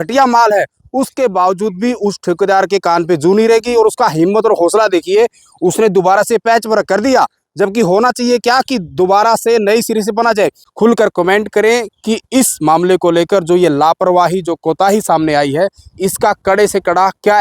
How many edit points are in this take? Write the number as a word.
one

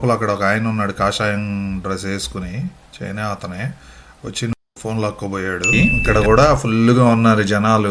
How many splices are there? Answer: one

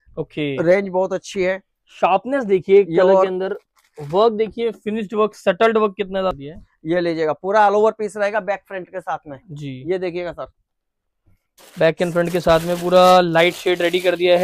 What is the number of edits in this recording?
one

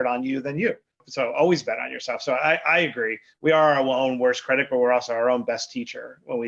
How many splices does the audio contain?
one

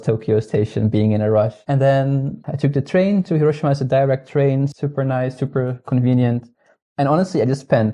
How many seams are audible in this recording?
one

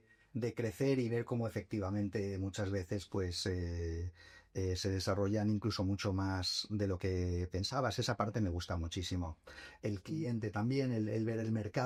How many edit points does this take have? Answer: zero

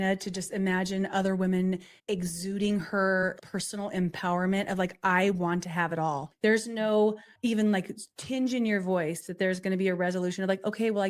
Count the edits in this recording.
four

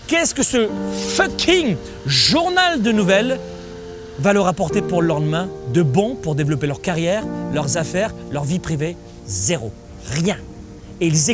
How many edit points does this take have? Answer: zero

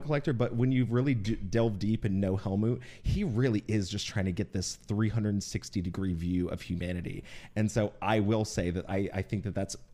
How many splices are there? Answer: zero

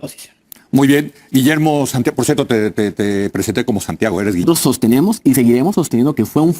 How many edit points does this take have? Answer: one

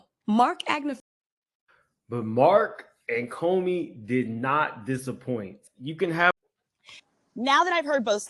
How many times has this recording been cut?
two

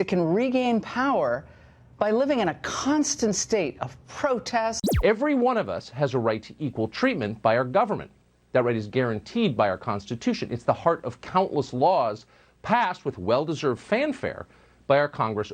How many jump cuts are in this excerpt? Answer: one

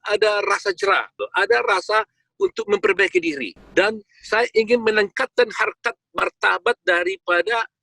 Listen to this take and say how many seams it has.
two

